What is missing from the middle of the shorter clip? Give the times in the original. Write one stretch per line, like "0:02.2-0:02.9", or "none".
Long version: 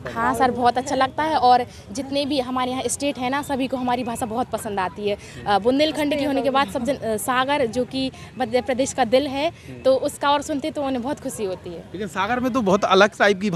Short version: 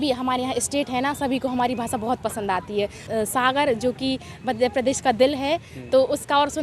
0:05.4-0:07.0

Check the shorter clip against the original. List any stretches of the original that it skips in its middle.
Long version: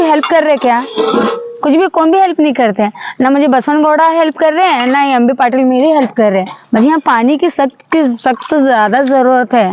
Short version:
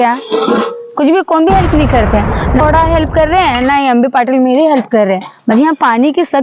0:03.3-0:03.9

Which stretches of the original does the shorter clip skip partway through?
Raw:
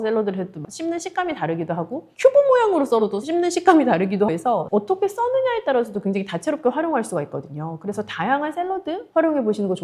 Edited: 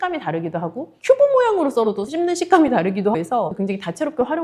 0:04.5-0:05.8

